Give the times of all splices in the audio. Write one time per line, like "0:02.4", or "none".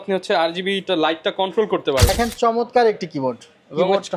0:02.1